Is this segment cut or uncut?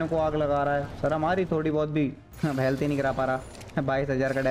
cut